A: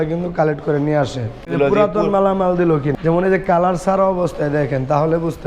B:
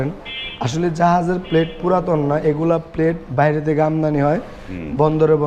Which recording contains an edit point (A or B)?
A